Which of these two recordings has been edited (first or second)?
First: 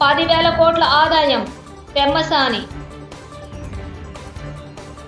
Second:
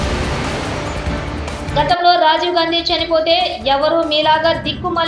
second